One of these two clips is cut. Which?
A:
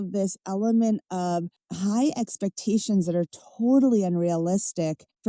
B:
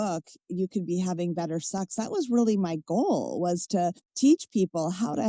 B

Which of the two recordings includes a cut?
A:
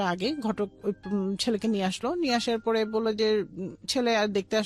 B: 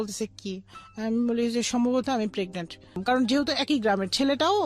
B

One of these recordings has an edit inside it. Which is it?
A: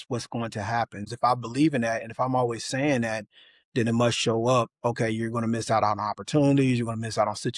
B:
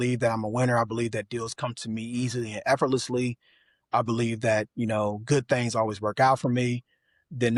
A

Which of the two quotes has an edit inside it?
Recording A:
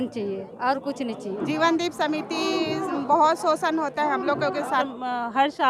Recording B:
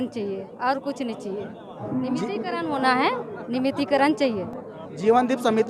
A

